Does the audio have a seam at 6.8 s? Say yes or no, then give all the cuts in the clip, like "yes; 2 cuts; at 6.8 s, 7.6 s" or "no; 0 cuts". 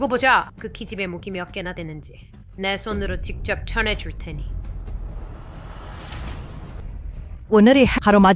yes; 1 cut; at 6.8 s